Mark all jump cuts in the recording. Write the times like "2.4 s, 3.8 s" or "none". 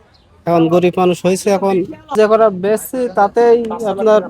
2.1 s